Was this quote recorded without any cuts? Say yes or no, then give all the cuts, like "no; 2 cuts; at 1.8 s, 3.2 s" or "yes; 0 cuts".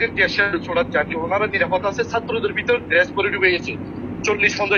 yes; 0 cuts